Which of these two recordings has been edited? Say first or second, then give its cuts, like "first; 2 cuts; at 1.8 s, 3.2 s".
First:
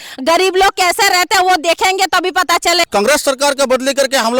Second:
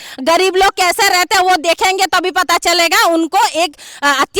first; 1 cut; at 2.9 s